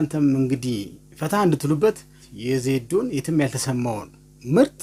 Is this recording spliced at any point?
no; 0 cuts

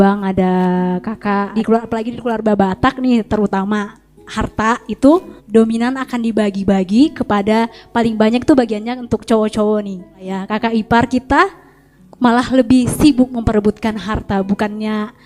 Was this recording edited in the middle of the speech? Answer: yes; 3 cuts; at 1.5 s, 5.4 s, 10.2 s

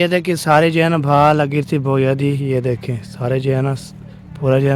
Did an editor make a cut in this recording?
no; 0 cuts

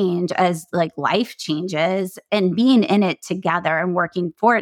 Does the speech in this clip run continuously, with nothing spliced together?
no; 1 cut; at 2.2 s

